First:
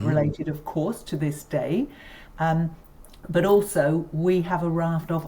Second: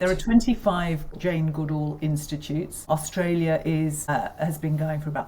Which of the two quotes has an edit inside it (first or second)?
second